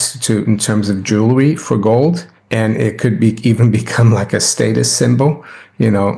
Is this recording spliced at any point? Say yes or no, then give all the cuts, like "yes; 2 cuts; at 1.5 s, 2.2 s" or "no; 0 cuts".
yes; 1 cut; at 2.3 s